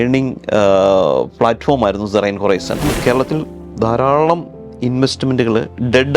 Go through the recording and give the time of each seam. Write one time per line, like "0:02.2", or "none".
0:03.0